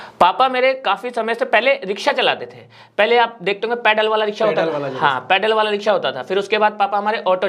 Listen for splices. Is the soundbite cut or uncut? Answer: uncut